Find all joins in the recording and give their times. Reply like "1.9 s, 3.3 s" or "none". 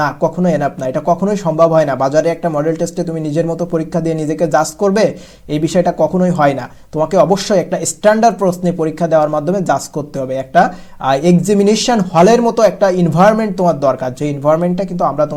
none